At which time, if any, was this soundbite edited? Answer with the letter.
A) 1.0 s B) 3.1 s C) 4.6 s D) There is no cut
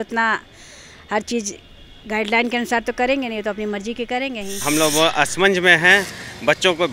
C